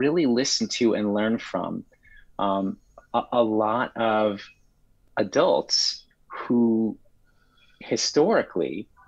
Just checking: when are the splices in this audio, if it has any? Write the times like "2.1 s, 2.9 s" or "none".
none